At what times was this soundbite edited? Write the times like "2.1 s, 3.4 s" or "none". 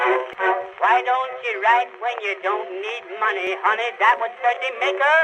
3.5 s